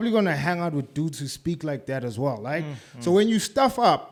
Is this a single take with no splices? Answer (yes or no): yes